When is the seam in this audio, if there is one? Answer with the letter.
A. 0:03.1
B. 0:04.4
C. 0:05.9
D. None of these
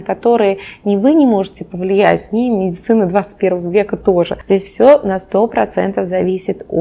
B